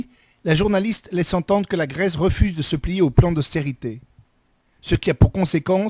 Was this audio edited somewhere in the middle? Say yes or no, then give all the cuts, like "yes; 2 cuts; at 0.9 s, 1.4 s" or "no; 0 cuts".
yes; 1 cut; at 1.8 s